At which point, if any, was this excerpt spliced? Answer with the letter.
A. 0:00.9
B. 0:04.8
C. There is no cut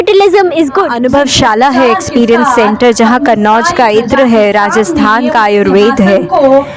A